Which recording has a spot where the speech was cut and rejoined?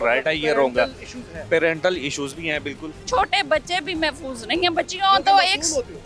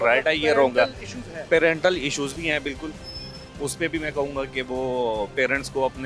first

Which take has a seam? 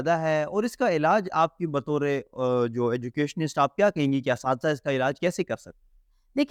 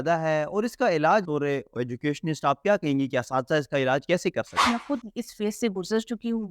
second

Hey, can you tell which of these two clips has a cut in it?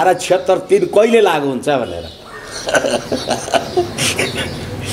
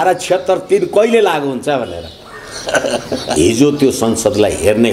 second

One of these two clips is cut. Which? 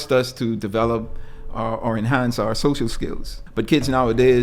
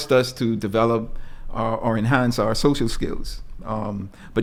first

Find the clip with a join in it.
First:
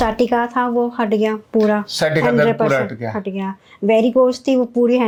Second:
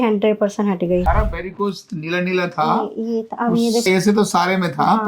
second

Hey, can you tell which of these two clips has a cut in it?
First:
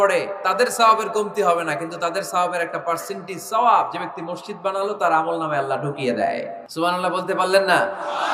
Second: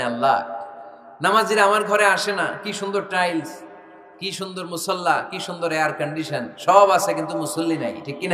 first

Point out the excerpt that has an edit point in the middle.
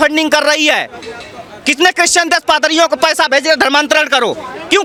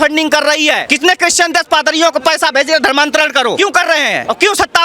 second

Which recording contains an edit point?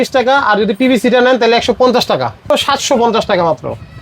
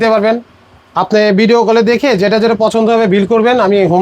first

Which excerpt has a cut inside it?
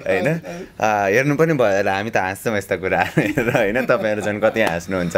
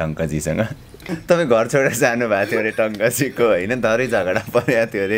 second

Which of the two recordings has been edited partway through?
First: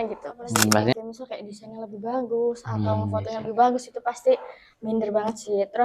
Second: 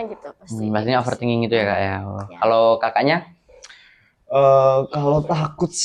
first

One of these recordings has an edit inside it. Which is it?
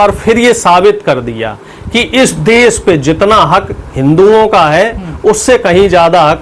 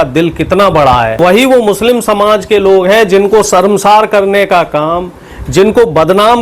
second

